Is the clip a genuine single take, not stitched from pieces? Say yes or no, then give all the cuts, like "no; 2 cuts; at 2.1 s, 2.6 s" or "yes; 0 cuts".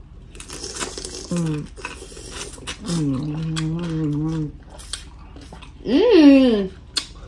yes; 0 cuts